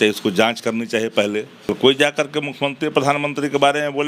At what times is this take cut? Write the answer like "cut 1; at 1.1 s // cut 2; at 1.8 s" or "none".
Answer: cut 1; at 1.7 s

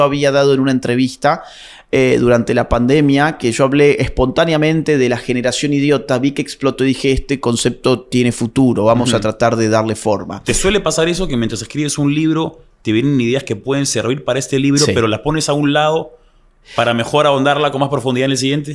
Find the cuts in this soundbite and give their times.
none

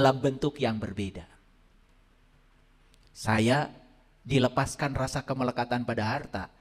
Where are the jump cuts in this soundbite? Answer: none

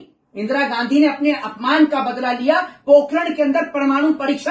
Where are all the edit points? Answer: none

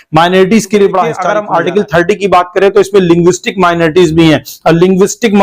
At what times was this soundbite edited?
cut 1; at 1.3 s

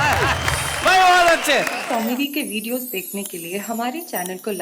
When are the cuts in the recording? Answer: cut 1; at 1.8 s

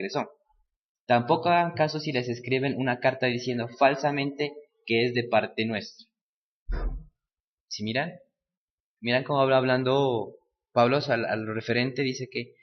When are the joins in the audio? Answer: cut 1; at 10.2 s

